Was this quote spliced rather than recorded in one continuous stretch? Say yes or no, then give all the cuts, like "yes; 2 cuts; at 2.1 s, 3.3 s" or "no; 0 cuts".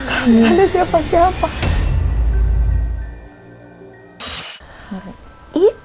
no; 0 cuts